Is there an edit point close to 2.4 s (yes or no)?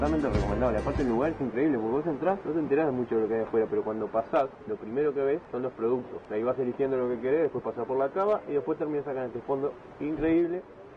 yes